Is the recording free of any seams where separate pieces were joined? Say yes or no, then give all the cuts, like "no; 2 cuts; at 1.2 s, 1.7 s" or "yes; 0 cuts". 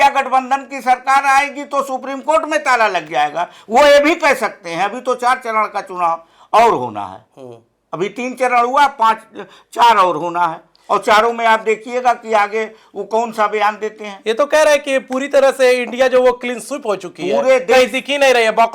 yes; 0 cuts